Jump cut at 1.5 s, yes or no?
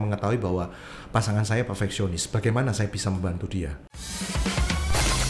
no